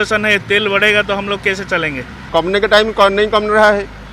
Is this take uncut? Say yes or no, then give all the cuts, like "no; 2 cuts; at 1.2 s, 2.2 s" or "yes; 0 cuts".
no; 1 cut; at 2.3 s